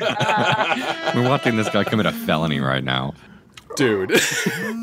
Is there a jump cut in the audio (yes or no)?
no